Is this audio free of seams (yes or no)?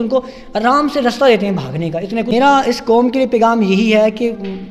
no